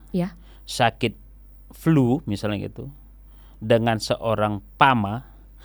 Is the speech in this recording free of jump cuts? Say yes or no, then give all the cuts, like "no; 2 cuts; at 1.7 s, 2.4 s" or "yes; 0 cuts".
yes; 0 cuts